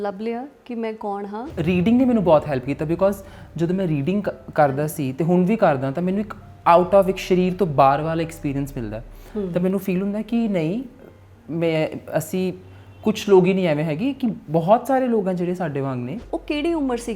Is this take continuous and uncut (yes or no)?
no